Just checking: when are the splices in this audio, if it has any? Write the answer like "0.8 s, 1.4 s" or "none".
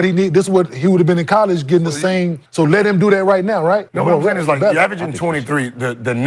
2.4 s, 3.9 s